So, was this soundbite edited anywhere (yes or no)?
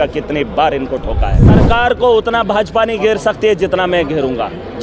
yes